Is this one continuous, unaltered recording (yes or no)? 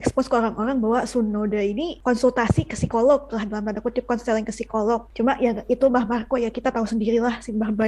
no